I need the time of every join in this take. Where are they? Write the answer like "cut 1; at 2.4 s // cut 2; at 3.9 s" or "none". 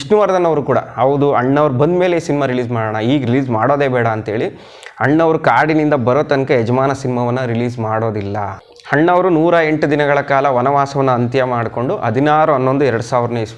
cut 1; at 8.6 s